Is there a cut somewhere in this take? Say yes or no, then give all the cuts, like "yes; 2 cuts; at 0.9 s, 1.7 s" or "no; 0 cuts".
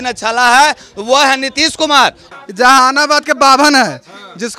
yes; 1 cut; at 2.2 s